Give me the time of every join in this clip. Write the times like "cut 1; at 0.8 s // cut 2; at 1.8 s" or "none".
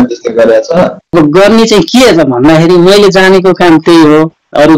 cut 1; at 1.0 s